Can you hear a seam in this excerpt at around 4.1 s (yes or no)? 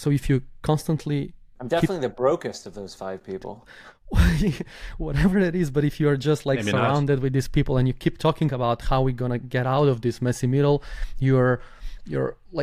no